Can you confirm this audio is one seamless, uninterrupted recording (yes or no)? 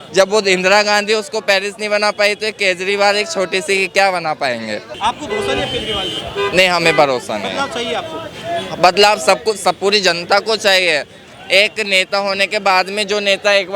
no